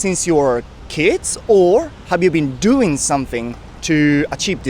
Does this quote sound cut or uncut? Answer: uncut